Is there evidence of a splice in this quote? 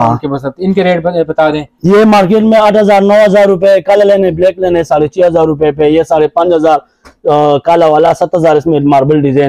no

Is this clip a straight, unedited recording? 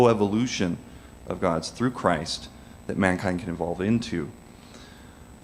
yes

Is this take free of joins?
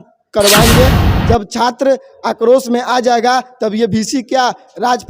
no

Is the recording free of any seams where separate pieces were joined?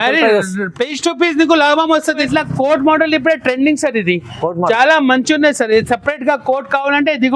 no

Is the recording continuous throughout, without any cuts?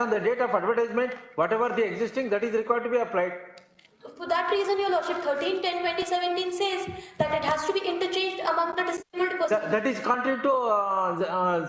yes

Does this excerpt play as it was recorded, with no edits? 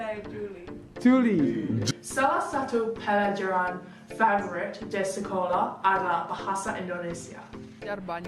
yes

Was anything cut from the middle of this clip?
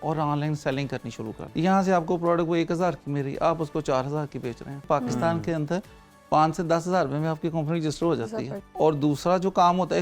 yes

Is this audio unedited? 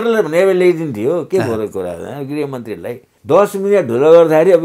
no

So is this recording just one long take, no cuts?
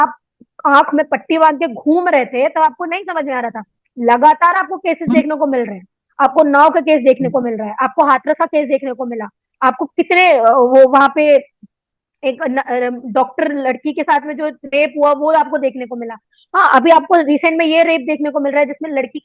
yes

